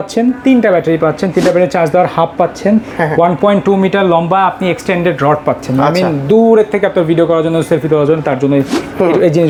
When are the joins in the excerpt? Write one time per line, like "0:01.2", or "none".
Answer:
none